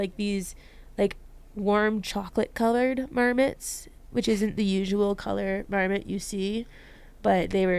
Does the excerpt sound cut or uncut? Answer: uncut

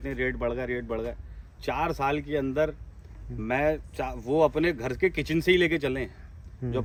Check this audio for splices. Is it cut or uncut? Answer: uncut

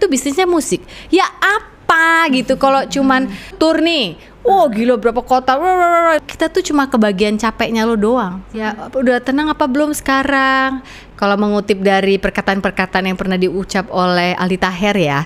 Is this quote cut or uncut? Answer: cut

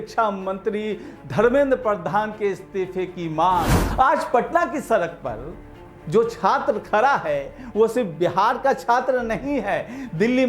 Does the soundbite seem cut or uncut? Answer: cut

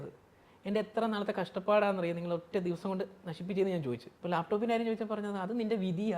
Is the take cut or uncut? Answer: cut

